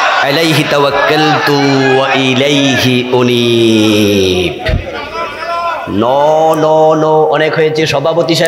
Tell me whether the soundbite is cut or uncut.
uncut